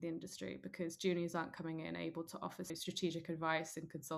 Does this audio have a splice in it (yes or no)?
yes